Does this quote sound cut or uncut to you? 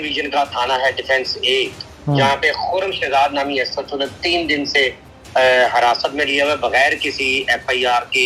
uncut